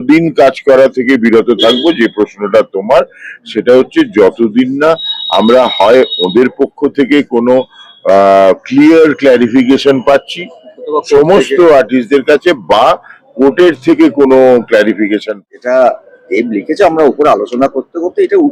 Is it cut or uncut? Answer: cut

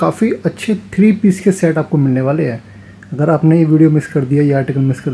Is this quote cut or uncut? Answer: uncut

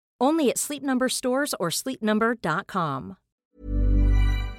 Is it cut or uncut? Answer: cut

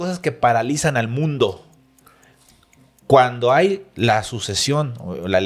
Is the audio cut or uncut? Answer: uncut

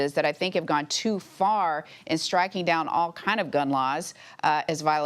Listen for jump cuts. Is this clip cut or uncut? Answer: uncut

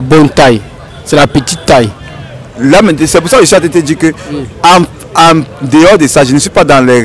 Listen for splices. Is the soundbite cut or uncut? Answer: uncut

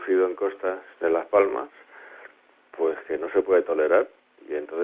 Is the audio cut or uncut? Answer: uncut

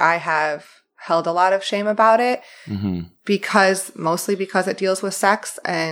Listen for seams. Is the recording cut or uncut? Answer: uncut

